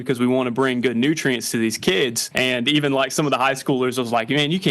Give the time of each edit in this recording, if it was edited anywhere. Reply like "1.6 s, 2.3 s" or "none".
2.2 s